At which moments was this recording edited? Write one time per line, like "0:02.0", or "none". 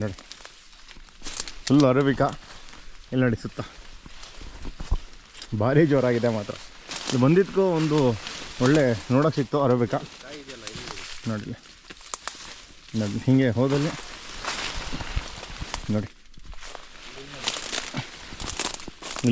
none